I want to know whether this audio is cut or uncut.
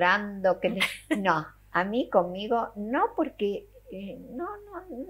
uncut